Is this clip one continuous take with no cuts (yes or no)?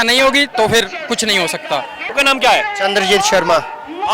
yes